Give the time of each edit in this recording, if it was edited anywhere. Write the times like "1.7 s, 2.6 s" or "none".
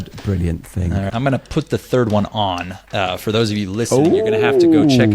1.1 s